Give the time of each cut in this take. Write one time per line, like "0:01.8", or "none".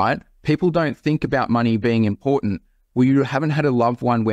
none